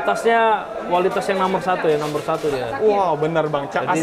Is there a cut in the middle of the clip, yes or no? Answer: no